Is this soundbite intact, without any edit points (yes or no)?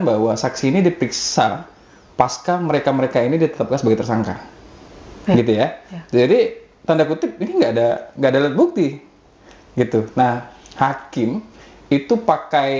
yes